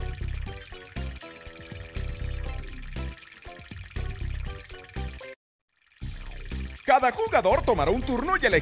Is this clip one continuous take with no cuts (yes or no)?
yes